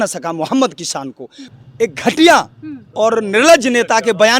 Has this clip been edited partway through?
yes; 1 cut; at 1.5 s

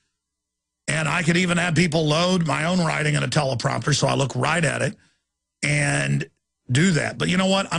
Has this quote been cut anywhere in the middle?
no; 0 cuts

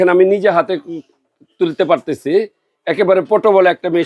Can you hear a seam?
no; 0 cuts

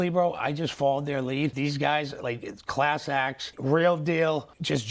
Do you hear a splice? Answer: yes; 1 cut; at 1.5 s

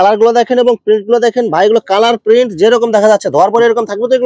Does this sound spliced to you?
no; 0 cuts

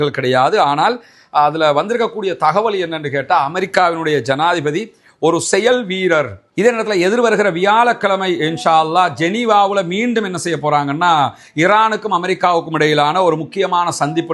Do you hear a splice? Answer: yes; 1 cut; at 6.5 s

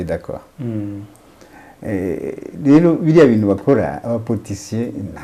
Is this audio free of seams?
yes; 0 cuts

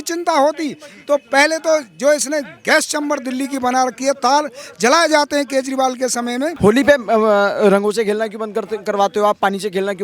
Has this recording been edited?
yes; 1 cut; at 6.5 s

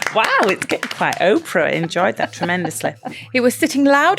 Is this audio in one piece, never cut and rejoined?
no; 1 cut; at 3.2 s

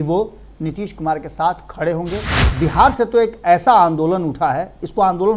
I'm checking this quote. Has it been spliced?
yes; 1 cut; at 2.3 s

